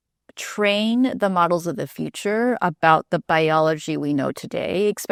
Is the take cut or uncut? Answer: uncut